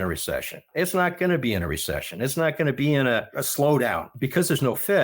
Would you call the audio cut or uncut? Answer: cut